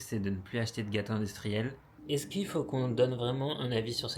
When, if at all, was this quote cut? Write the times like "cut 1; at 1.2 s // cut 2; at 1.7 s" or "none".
cut 1; at 2.0 s